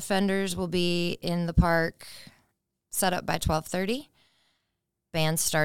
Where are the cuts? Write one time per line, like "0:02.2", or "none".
none